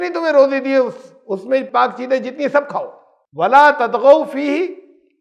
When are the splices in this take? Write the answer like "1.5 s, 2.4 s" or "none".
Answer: none